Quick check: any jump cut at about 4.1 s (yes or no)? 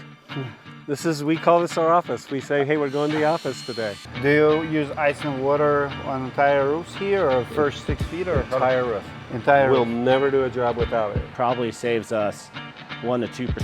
yes